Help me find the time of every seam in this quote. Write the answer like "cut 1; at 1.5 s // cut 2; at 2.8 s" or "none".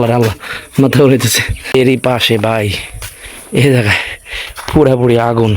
cut 1; at 1.7 s